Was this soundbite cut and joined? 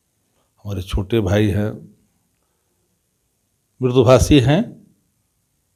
no; 0 cuts

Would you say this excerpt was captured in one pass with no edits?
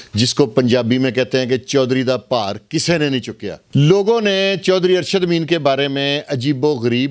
no; 1 cut; at 3.6 s

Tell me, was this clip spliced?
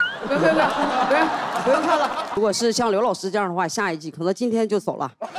yes; 1 cut; at 2.3 s

